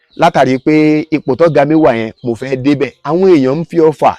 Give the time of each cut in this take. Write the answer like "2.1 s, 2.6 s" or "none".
2.9 s